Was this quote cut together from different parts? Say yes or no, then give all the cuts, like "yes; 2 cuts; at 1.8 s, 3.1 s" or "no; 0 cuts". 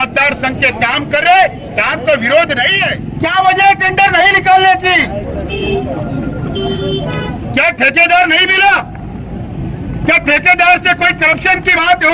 yes; 1 cut; at 3.0 s